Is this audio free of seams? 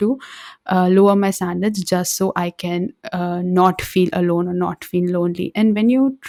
yes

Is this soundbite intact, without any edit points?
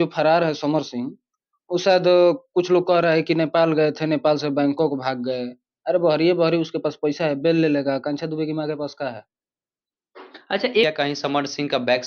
no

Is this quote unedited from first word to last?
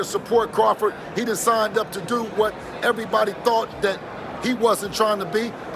yes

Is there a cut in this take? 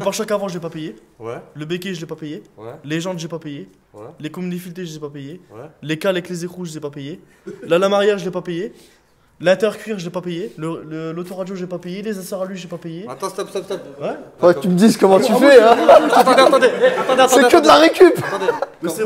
no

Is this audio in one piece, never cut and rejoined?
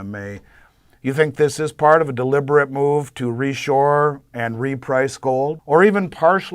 no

